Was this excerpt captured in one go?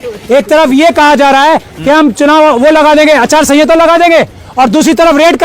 yes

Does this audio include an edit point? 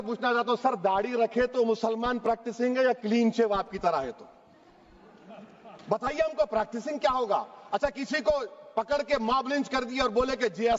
no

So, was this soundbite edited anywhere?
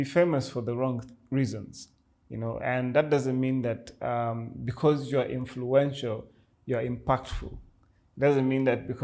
no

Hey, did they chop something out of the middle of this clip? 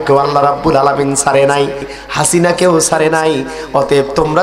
yes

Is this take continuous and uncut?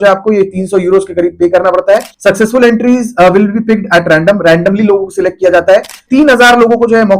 no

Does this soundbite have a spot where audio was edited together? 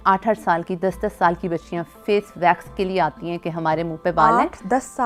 no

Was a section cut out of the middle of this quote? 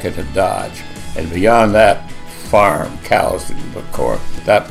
no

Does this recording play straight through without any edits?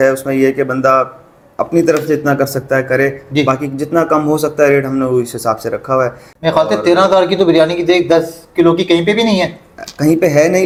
yes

